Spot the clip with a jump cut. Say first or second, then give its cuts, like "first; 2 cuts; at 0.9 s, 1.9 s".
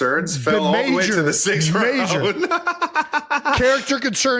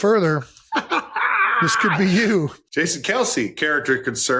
second; 1 cut; at 2.6 s